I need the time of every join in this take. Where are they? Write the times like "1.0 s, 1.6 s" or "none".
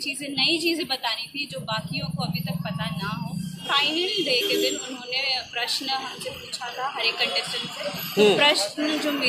3.6 s

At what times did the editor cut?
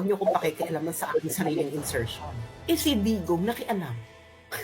2.5 s

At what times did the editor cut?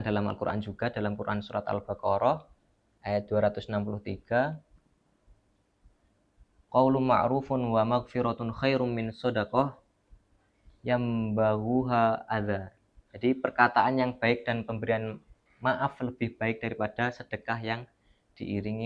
none

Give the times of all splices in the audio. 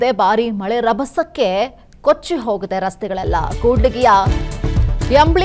1.8 s

